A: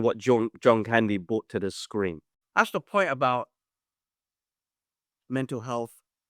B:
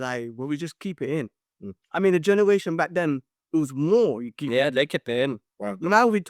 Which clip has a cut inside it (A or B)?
A